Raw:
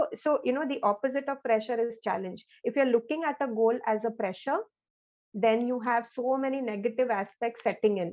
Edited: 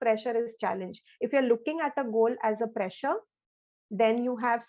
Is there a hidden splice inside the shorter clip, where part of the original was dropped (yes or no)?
no